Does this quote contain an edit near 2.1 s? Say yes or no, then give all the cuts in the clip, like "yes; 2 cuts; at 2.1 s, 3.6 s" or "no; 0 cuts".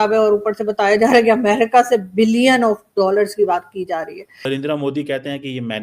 no; 1 cut; at 4.4 s